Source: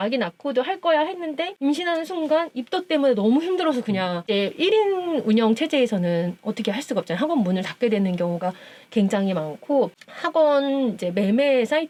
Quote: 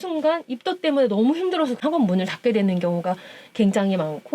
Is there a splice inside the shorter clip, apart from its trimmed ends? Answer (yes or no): yes